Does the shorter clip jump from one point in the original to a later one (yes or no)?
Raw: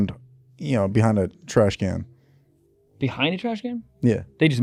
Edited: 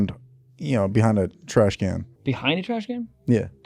yes